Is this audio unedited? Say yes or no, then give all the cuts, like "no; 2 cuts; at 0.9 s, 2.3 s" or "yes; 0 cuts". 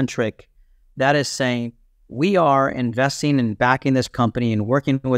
yes; 0 cuts